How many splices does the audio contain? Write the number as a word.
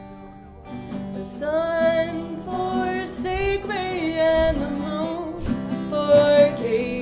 zero